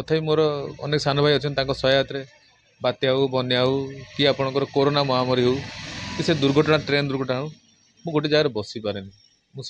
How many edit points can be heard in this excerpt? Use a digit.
0